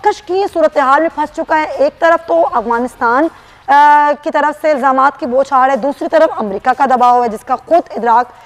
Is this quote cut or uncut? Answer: uncut